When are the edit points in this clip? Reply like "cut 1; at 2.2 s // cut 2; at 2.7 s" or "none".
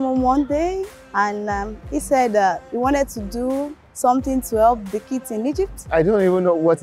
cut 1; at 1.0 s // cut 2; at 3.8 s // cut 3; at 5.9 s